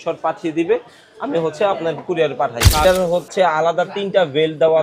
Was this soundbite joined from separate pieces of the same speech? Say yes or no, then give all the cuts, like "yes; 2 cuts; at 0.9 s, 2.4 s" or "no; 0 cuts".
yes; 1 cut; at 2.8 s